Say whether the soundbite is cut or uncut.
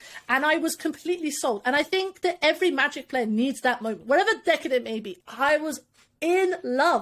cut